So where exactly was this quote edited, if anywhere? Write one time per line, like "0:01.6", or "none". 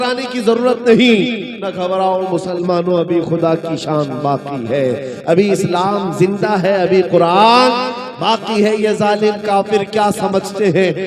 none